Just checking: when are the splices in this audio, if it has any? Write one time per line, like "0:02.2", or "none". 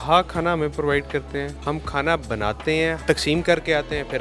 0:03.0